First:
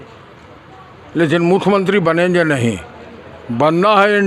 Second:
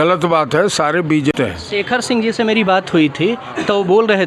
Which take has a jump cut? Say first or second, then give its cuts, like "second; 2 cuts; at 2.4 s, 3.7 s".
second; 1 cut; at 1.3 s